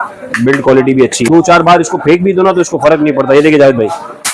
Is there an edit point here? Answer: yes; 1 cut; at 1.2 s

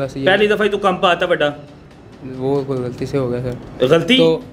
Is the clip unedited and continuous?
yes; 0 cuts

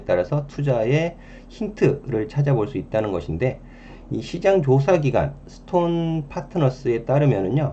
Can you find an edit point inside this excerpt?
no; 0 cuts

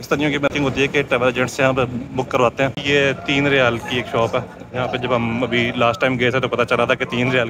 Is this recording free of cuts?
no; 1 cut; at 2.8 s

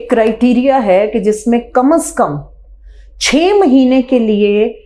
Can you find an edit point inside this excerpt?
no; 0 cuts

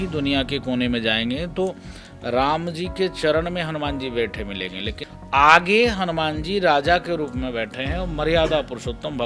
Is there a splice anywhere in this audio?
yes; 1 cut; at 5.1 s

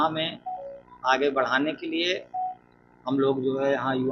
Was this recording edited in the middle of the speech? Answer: no; 0 cuts

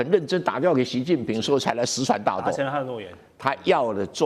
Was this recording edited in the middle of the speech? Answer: no; 0 cuts

